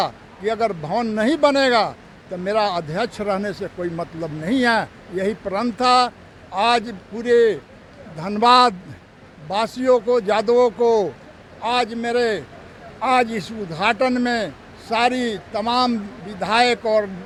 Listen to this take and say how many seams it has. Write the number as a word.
zero